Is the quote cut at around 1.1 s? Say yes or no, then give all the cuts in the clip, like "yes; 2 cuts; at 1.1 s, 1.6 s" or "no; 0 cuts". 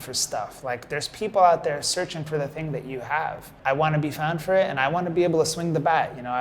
no; 1 cut; at 3.4 s